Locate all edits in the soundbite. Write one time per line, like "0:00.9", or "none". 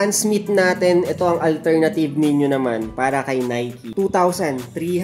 0:03.9